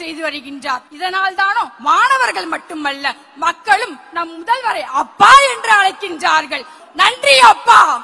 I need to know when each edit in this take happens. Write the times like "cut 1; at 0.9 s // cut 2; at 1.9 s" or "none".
cut 1; at 0.9 s // cut 2; at 6.8 s